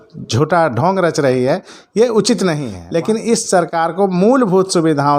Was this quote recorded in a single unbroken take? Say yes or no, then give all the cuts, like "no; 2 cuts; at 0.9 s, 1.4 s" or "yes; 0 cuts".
no; 1 cut; at 2.7 s